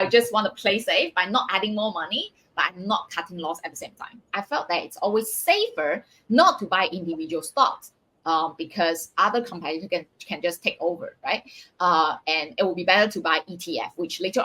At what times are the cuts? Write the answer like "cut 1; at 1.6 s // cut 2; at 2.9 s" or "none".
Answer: cut 1; at 4.3 s